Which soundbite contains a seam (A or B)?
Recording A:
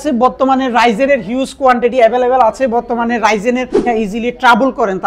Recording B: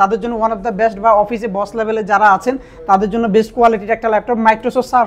A